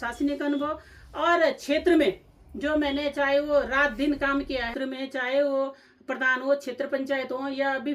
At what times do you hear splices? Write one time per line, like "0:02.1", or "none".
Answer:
0:04.7